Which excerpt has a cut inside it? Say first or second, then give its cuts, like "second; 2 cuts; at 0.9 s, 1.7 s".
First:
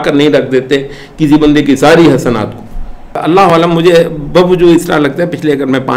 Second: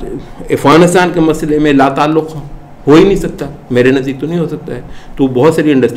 first; 1 cut; at 3.2 s